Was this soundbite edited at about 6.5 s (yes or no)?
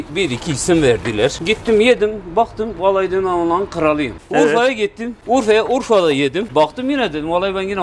yes